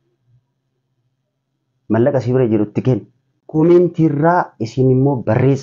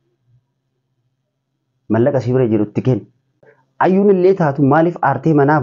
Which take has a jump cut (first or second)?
second